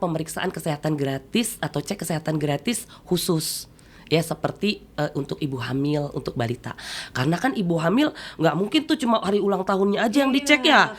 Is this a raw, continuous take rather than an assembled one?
yes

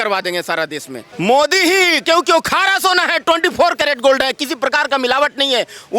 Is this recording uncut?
no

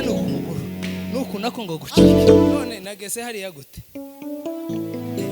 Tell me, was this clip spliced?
yes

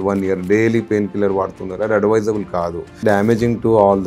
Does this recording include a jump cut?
yes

